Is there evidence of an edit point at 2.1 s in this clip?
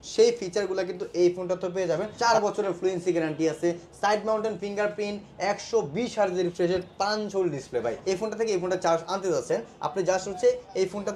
yes; 2 cuts; at 2.1 s, 8.0 s

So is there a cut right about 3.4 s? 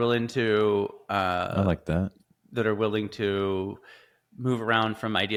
no; 0 cuts

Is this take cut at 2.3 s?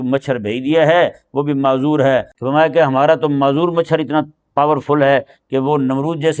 yes; 1 cut; at 2.3 s

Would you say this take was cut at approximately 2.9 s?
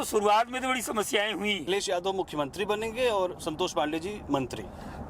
no; 1 cut; at 1.6 s

